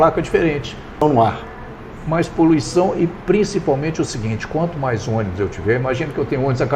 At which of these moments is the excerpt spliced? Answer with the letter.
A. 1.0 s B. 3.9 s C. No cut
A